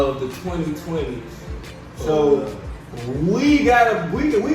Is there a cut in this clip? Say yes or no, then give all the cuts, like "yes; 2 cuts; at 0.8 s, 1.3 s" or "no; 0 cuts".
no; 0 cuts